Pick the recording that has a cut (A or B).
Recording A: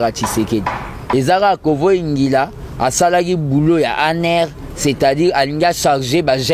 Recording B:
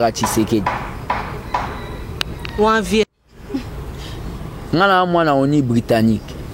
A